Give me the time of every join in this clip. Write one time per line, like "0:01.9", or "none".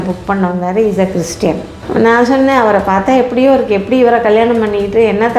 0:01.7